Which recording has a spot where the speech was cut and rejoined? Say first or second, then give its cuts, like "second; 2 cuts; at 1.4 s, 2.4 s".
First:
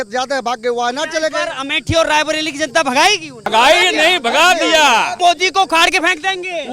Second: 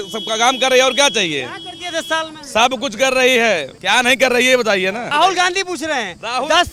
first; 2 cuts; at 3.5 s, 5.2 s